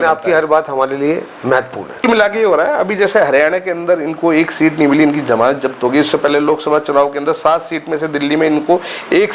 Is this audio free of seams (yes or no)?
no